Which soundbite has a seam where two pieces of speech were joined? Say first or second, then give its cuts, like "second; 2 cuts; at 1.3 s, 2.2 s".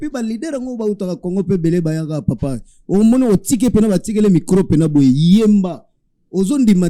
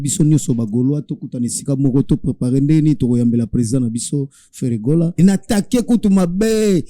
second; 1 cut; at 5.1 s